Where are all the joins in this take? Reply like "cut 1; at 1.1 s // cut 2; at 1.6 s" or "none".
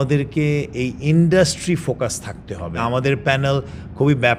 cut 1; at 2.8 s